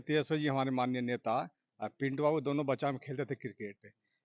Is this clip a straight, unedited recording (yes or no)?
yes